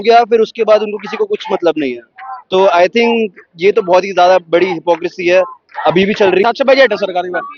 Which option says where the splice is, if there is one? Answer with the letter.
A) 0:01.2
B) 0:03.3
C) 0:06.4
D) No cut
C